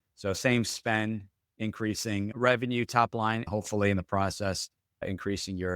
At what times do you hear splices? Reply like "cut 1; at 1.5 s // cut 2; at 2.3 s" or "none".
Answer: cut 1; at 3.5 s